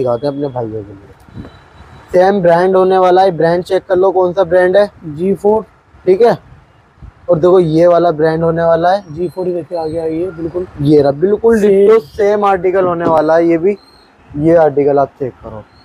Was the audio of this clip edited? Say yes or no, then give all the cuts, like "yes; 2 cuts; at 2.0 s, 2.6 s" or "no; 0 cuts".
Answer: no; 0 cuts